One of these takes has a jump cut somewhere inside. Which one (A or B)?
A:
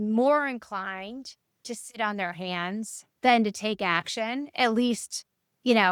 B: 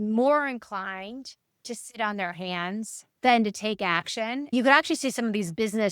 B